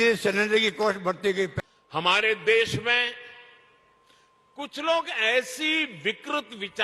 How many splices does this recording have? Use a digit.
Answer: 1